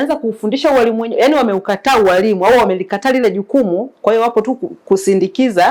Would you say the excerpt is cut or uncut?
uncut